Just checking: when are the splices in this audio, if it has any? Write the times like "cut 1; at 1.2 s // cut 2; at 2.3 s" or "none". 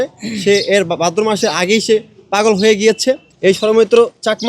cut 1; at 3.3 s